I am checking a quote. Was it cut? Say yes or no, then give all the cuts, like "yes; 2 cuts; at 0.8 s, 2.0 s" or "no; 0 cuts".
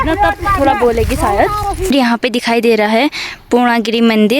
yes; 1 cut; at 1.9 s